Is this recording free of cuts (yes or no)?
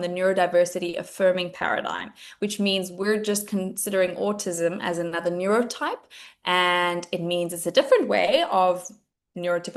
yes